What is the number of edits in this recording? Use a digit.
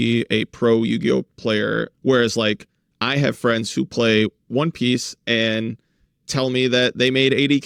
0